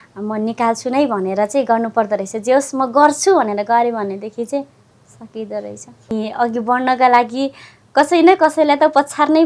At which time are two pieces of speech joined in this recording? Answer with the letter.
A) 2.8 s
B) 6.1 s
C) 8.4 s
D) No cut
B